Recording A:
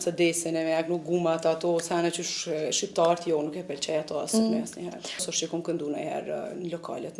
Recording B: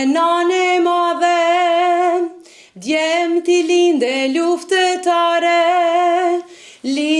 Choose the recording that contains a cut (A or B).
A